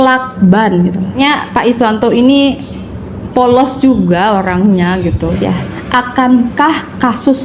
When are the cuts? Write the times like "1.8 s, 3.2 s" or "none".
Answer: 1.1 s, 5.4 s